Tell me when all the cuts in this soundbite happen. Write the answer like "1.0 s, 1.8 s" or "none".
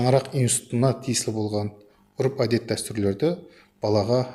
none